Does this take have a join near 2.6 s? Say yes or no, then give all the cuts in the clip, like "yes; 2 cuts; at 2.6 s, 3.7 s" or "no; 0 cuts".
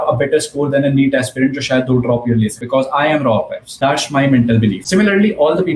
yes; 3 cuts; at 2.6 s, 3.6 s, 4.8 s